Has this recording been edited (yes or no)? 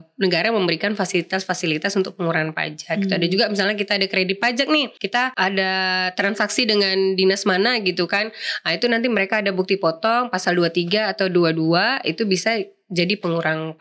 yes